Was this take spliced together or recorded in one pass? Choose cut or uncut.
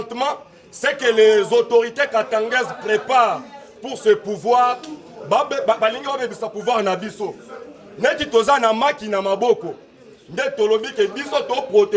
uncut